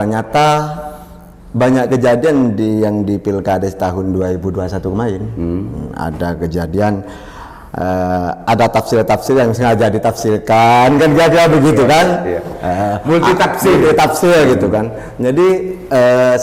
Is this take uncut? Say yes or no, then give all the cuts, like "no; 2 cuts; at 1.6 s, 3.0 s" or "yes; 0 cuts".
yes; 0 cuts